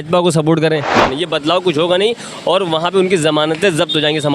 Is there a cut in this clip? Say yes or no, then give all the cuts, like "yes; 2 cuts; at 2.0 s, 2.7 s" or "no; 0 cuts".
yes; 1 cut; at 1.0 s